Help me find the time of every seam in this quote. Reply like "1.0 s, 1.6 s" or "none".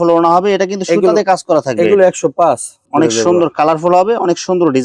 2.8 s

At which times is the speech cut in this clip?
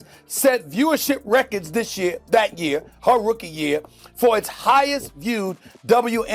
none

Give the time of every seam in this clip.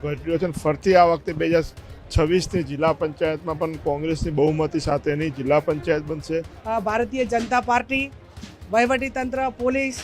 6.6 s

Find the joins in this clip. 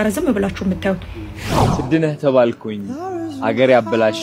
1.6 s

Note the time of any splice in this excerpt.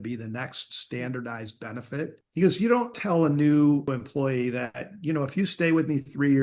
2.2 s, 3.0 s, 3.9 s

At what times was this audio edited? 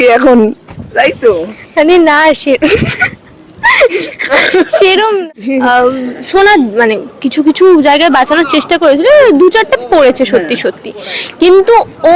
5.2 s

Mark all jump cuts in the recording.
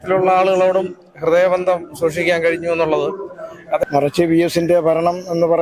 3.8 s

